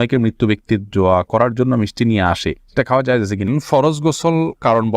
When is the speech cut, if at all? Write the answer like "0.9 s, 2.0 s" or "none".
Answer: 3.5 s